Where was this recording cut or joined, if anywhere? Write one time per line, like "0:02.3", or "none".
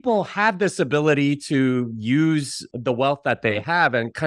0:02.6